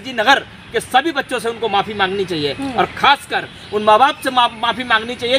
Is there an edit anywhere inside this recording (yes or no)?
no